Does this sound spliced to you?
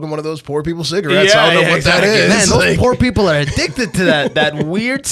no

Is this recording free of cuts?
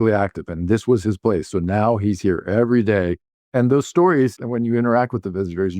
no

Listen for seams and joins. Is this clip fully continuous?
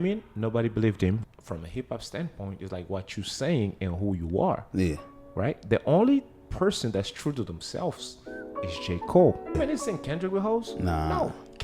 no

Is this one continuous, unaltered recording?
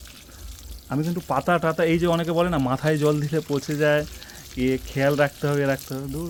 yes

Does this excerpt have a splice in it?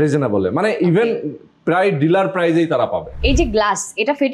yes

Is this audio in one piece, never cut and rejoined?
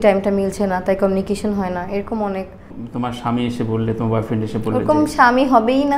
no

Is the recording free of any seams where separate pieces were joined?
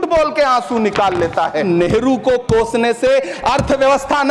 yes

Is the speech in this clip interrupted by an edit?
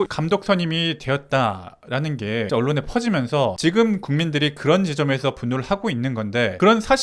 no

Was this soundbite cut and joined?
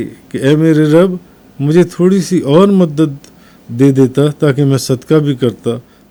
no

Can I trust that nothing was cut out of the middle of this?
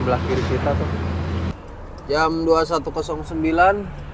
no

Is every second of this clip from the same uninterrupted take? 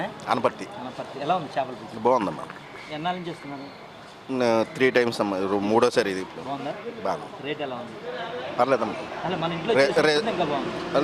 yes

